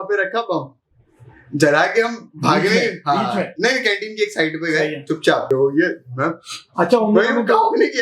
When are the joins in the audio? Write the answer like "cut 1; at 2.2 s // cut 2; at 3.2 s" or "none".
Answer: cut 1; at 5.5 s